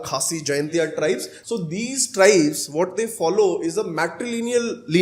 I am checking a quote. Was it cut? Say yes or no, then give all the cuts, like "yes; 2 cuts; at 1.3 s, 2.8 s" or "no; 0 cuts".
yes; 1 cut; at 1.3 s